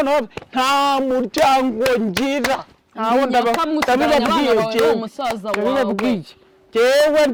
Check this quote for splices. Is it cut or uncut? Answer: uncut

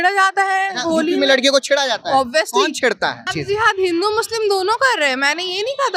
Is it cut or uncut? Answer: cut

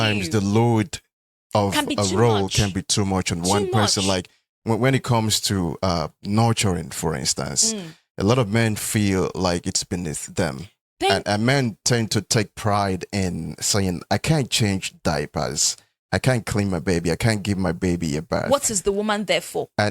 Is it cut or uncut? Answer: uncut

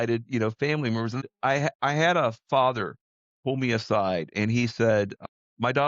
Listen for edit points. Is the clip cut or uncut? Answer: cut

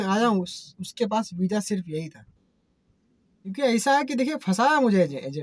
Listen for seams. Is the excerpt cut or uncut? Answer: cut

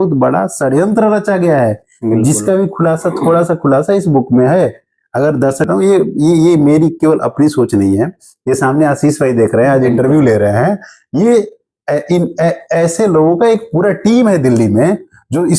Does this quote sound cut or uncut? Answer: cut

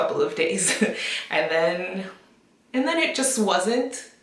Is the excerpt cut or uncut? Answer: uncut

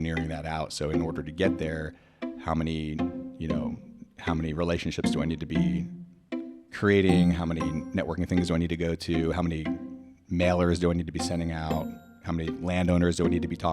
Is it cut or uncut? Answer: uncut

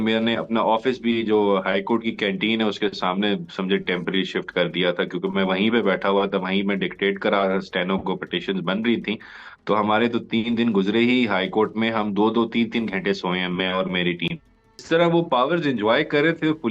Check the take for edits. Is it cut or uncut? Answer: cut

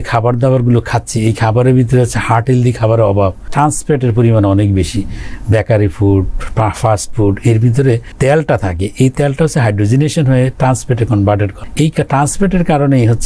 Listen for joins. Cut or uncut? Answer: cut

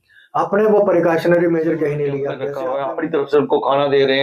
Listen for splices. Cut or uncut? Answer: cut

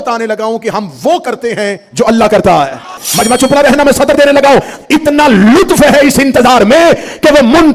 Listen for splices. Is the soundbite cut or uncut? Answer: cut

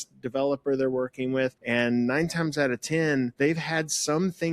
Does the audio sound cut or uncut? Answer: cut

